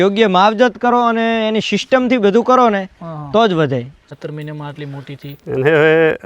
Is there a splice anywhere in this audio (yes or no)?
yes